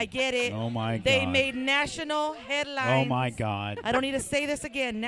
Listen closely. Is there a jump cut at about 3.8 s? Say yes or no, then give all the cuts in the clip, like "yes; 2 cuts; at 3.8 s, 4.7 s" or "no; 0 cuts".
no; 0 cuts